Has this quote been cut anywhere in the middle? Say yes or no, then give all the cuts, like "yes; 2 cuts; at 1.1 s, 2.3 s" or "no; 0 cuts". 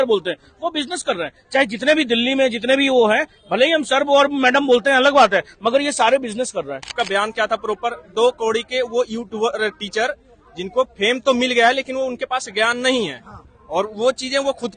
yes; 1 cut; at 6.9 s